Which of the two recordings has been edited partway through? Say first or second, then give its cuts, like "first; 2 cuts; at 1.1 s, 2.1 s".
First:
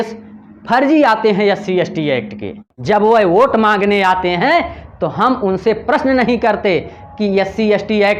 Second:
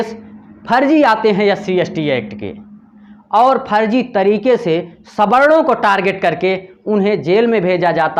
first; 1 cut; at 2.7 s